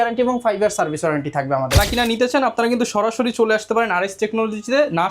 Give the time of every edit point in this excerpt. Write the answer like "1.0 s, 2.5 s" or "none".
1.8 s